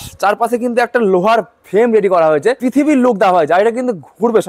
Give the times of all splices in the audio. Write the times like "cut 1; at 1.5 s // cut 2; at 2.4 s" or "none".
cut 1; at 2.6 s